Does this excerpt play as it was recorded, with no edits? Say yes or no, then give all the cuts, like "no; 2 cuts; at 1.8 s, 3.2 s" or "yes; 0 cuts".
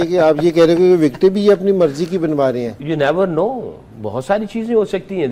yes; 0 cuts